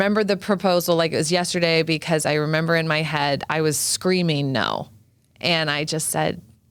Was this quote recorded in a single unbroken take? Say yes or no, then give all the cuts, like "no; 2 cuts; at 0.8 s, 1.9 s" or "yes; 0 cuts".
yes; 0 cuts